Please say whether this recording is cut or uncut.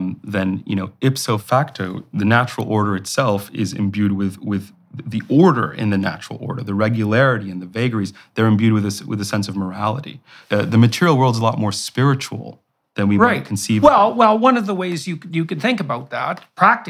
cut